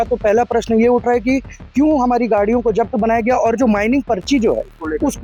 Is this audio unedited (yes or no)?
yes